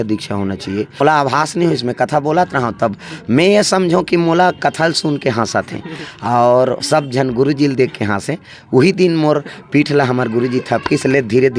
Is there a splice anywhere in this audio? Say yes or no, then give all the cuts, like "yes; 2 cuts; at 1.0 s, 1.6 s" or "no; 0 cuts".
yes; 1 cut; at 1.0 s